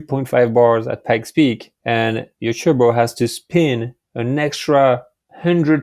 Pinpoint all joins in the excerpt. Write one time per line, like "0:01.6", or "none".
0:02.3